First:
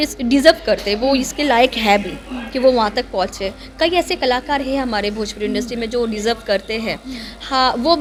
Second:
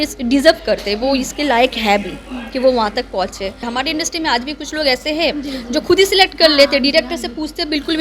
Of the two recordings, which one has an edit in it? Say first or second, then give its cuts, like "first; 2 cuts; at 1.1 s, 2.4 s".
second; 1 cut; at 3.6 s